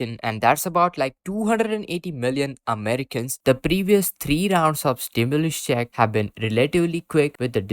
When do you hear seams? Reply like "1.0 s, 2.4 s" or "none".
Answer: 3.4 s